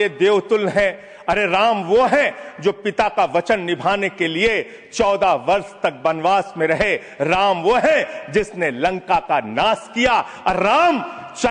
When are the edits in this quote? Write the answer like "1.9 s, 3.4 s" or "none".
none

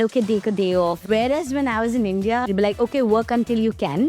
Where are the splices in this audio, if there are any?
1.0 s, 2.5 s

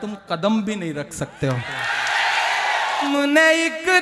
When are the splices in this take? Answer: 3.1 s

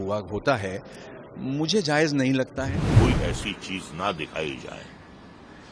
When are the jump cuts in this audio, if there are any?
2.9 s

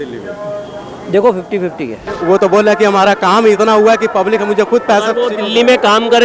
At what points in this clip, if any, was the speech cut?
2.0 s

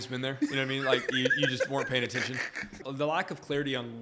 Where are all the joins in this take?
2.8 s

